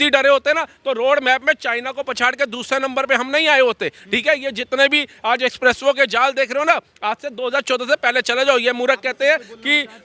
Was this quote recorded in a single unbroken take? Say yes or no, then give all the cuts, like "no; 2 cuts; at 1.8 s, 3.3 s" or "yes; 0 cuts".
yes; 0 cuts